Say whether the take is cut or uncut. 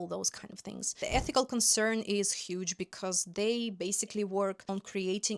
cut